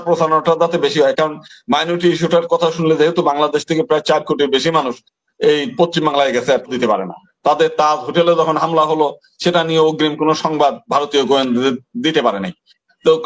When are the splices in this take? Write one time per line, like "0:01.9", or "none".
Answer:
0:06.7